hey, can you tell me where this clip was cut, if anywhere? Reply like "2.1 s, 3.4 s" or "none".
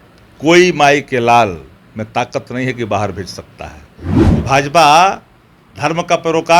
4.4 s